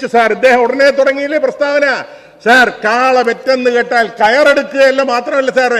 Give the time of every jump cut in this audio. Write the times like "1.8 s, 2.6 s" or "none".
none